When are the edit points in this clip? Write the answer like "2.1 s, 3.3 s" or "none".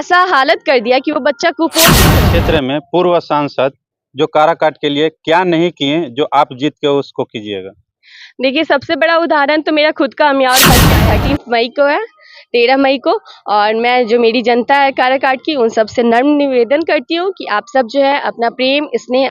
2.1 s, 10.9 s